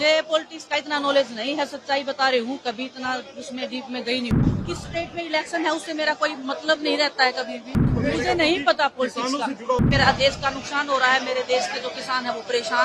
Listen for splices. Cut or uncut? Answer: cut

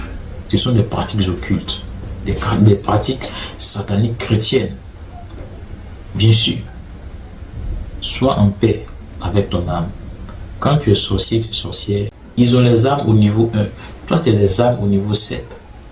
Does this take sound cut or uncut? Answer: cut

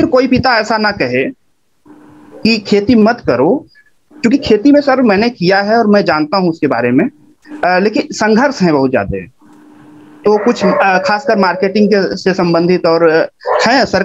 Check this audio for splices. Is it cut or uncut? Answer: uncut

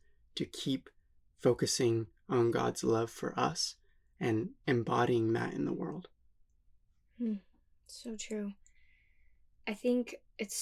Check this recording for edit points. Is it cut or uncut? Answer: uncut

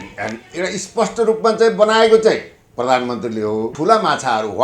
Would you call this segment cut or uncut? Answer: cut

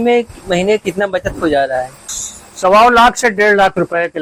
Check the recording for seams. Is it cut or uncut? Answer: uncut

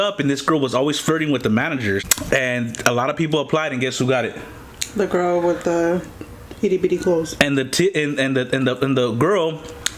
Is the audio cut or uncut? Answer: cut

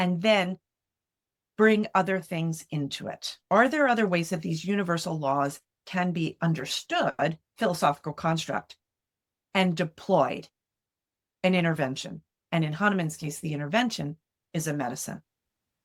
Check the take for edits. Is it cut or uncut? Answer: uncut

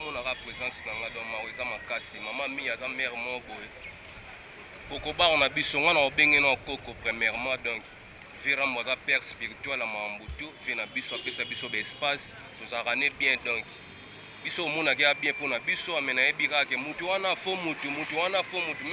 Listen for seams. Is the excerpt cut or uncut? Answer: uncut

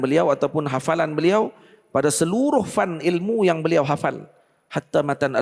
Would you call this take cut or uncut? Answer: uncut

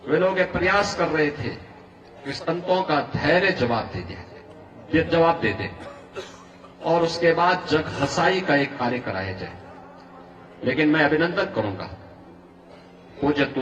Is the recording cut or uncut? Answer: uncut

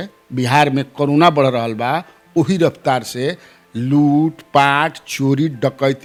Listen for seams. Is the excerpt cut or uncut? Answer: uncut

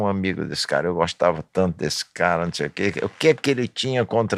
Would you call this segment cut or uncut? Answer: uncut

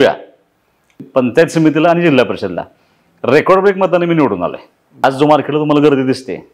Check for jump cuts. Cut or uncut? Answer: cut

